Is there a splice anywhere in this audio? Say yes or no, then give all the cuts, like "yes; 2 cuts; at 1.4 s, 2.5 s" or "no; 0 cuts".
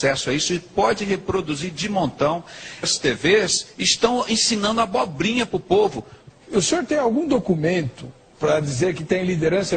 no; 0 cuts